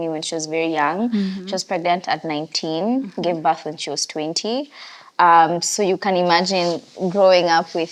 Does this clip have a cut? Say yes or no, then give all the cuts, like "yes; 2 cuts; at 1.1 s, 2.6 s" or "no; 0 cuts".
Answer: no; 0 cuts